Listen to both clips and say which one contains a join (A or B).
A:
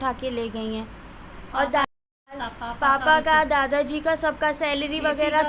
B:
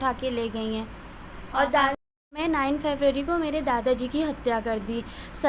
B